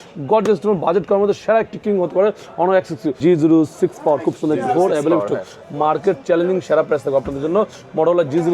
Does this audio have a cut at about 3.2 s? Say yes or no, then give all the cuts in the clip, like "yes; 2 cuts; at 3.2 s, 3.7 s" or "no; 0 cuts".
yes; 1 cut; at 3.2 s